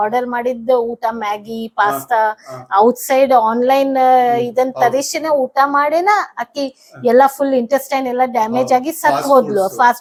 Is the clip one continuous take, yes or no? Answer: yes